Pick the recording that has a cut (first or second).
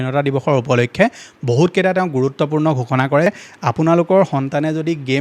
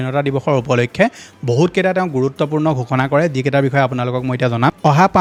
first